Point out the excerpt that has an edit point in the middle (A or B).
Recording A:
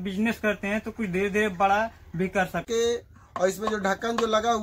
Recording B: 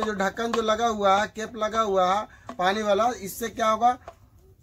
A